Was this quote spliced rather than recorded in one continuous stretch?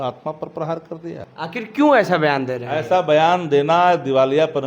yes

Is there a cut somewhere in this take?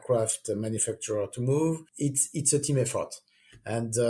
no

